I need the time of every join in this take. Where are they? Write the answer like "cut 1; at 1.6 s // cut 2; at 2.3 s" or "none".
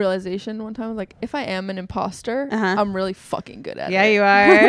none